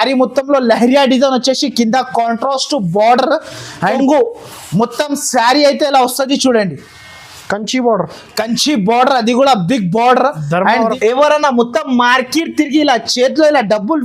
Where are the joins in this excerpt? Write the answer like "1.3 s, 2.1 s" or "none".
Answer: 4.0 s, 10.9 s